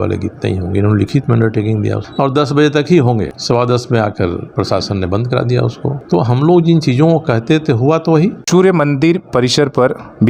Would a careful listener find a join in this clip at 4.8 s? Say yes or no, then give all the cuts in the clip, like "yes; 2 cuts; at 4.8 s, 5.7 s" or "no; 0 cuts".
no; 4 cuts; at 2.0 s, 3.4 s, 6.0 s, 8.4 s